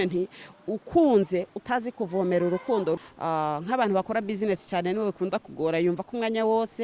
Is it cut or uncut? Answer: cut